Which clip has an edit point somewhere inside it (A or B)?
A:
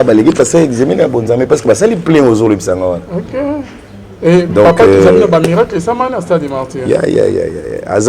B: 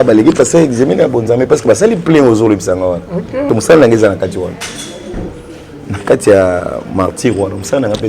B